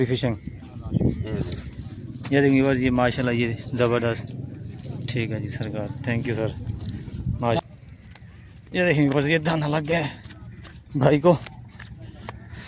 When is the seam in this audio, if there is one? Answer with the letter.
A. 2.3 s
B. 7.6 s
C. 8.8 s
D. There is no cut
B